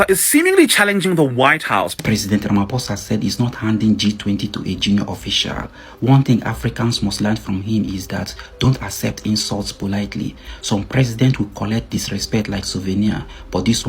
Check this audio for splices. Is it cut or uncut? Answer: cut